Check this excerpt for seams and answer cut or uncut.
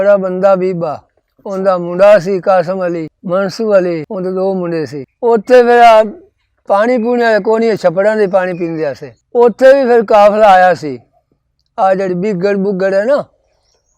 cut